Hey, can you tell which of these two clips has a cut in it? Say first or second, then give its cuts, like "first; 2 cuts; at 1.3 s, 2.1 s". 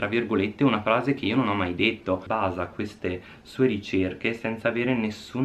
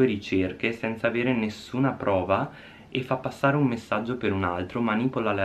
first; 1 cut; at 2.2 s